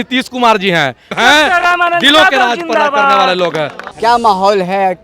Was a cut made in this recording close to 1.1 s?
yes; 2 cuts; at 1.1 s, 3.8 s

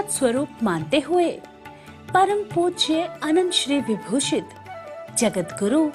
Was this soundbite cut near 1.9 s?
no; 0 cuts

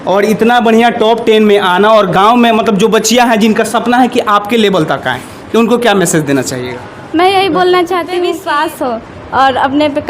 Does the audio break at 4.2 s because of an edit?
no; 1 cut; at 8.3 s

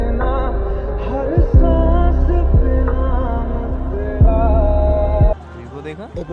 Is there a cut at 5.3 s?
yes; 1 cut; at 5.3 s

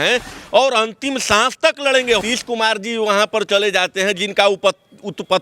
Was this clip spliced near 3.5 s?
no; 1 cut; at 2.2 s

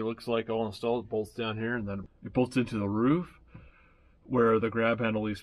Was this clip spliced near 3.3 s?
no; 1 cut; at 2.0 s

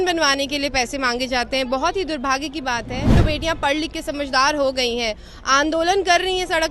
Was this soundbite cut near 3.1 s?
yes; 1 cut; at 3.1 s

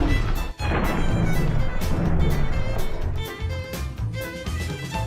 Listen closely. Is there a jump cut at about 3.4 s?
yes; 1 cut; at 3.4 s

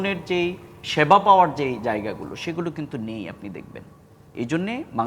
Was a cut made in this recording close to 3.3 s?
no; 0 cuts

